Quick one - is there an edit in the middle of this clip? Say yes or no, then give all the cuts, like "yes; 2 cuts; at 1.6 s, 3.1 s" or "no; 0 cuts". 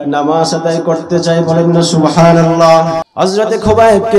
yes; 1 cut; at 3.0 s